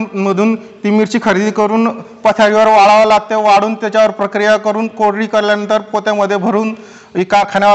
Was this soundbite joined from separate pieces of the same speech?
no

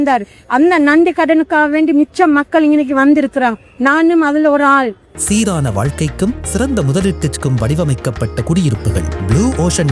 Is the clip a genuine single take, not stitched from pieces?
no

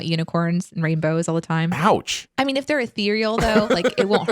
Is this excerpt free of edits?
no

